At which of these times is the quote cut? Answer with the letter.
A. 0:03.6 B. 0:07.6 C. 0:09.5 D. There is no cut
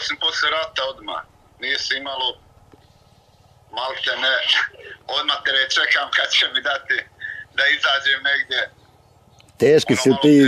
D